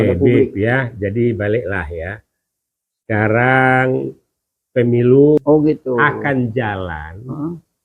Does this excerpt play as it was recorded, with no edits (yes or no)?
no